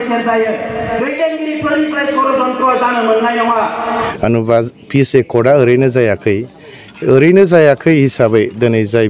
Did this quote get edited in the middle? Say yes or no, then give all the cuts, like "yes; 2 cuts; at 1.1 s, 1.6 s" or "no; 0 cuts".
yes; 1 cut; at 4.1 s